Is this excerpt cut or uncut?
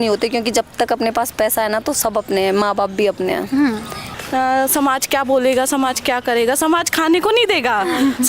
cut